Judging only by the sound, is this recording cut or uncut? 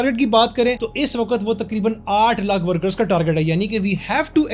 uncut